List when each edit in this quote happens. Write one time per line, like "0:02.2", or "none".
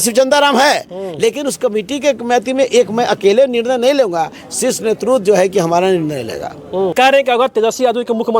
0:06.9